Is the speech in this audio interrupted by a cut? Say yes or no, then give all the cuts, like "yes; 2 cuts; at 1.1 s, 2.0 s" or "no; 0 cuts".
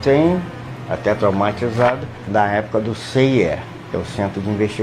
yes; 2 cuts; at 2.2 s, 3.7 s